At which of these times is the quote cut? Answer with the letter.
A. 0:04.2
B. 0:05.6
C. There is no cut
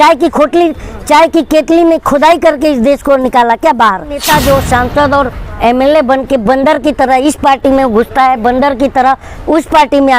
A